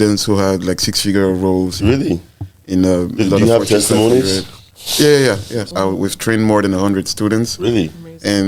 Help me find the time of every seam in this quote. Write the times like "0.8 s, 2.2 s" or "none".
5.7 s

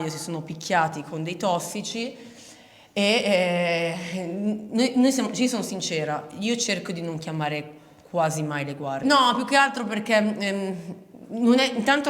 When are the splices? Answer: none

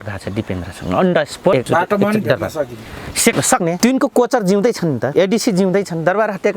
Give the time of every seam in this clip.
1.6 s, 3.4 s, 5.0 s

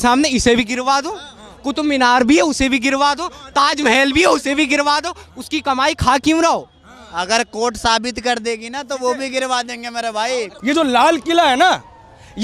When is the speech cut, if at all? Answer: 10.5 s

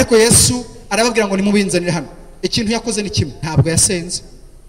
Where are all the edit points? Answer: 3.4 s

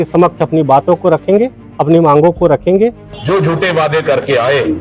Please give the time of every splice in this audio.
3.1 s

